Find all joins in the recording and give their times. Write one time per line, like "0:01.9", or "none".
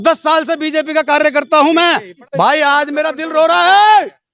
0:02.2